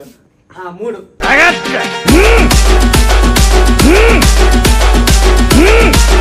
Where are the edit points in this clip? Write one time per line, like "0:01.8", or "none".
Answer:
0:01.1